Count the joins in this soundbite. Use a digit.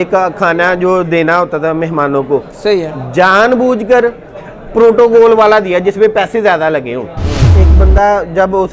1